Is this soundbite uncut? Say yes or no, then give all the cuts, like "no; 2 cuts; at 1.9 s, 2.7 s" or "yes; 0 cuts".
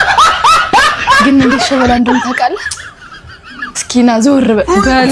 no; 1 cut; at 1.2 s